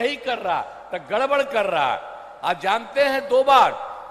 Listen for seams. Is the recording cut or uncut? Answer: uncut